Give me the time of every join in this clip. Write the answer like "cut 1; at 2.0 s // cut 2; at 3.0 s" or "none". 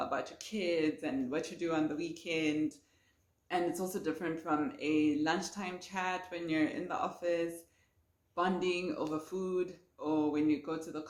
none